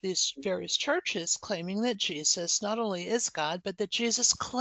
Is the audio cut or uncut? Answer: uncut